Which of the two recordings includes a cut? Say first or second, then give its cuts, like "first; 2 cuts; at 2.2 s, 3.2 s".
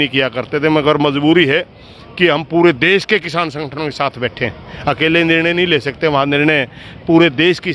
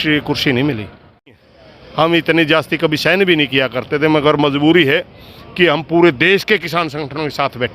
second; 1 cut; at 1.3 s